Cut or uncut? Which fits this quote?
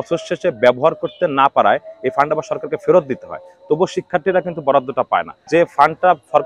cut